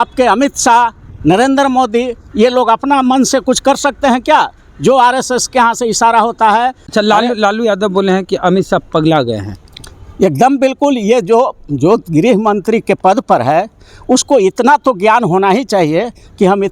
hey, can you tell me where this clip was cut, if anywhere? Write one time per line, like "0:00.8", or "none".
0:06.9